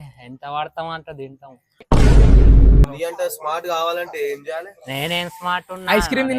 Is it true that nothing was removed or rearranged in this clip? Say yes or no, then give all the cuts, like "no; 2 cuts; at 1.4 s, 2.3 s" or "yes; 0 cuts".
no; 1 cut; at 2.9 s